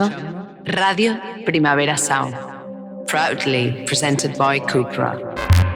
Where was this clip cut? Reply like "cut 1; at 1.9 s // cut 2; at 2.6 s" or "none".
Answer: none